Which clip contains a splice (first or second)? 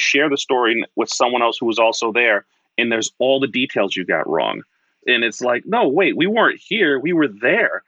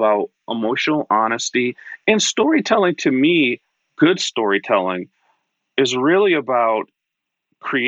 first